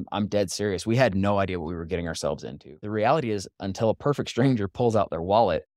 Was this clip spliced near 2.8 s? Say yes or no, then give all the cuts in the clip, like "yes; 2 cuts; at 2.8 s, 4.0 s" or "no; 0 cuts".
yes; 1 cut; at 2.8 s